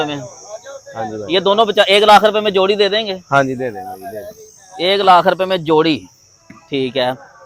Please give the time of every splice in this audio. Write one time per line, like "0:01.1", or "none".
none